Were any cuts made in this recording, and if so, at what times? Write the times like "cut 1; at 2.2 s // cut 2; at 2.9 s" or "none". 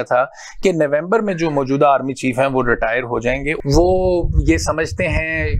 cut 1; at 3.5 s

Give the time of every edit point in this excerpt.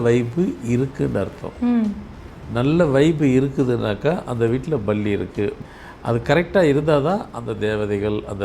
cut 1; at 5.6 s

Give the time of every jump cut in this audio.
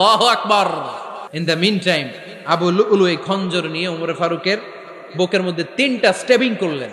cut 1; at 1.3 s

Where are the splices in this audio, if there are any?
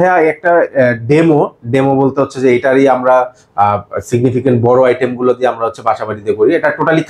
none

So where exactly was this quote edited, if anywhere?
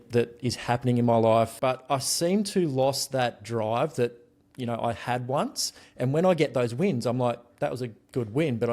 cut 1; at 1.5 s

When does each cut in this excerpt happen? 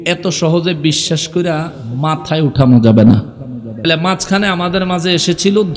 cut 1; at 3.8 s

